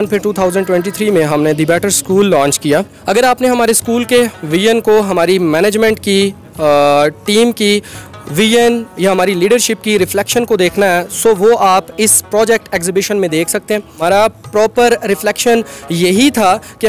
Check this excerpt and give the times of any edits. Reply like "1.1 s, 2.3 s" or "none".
2.9 s, 13.9 s

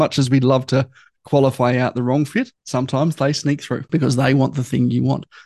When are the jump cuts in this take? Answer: 2.6 s, 3.9 s

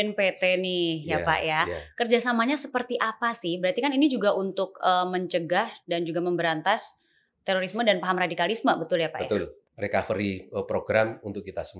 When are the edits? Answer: 9.6 s

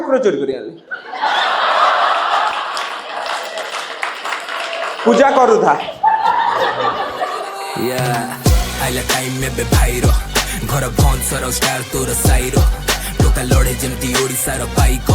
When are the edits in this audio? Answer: 7.8 s

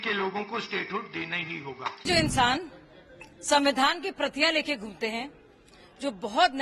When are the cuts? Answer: 2.0 s

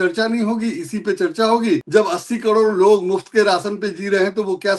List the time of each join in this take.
1.8 s

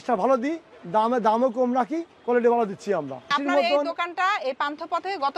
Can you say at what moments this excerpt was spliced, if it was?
3.4 s

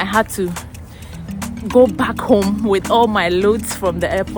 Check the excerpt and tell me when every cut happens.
none

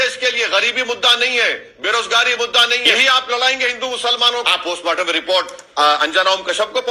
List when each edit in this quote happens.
2.9 s, 4.4 s

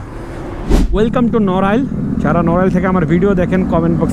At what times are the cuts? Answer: 0.9 s

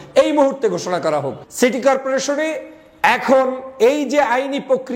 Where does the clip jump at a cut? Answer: 1.4 s

